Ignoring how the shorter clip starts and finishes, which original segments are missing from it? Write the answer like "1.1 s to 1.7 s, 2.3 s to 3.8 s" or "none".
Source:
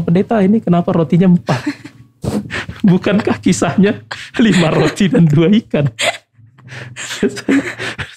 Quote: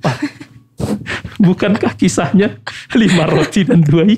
none